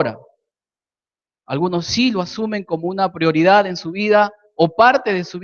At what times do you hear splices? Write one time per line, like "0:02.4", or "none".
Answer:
0:04.4

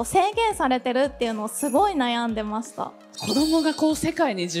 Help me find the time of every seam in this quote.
0:03.1

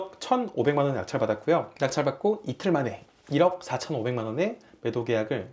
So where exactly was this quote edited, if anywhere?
none

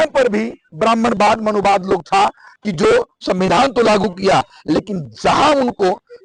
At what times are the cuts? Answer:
none

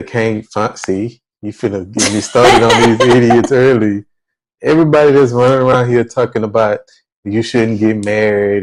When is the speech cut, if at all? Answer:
none

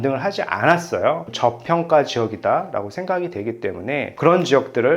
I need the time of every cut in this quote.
0:01.2

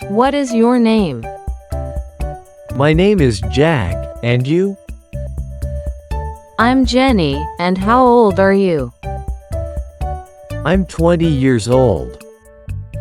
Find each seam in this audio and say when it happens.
0:01.2
0:02.6
0:04.8
0:06.4

